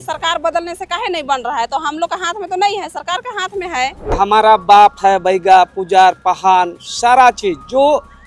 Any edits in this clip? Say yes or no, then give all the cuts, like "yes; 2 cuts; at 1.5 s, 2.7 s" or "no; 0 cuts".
yes; 1 cut; at 4.1 s